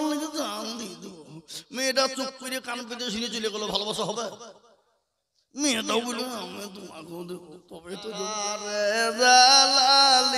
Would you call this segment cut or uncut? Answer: cut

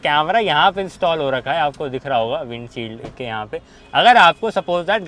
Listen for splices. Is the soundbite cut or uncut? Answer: uncut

